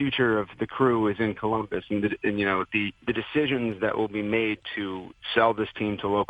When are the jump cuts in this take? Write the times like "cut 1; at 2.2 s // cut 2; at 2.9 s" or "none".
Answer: cut 1; at 2.9 s // cut 2; at 5.2 s